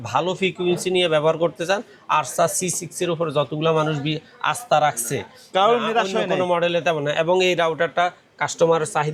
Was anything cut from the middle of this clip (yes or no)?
no